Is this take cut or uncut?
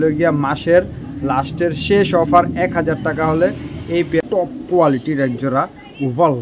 cut